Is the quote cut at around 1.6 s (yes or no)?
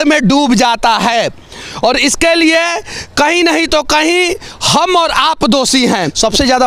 no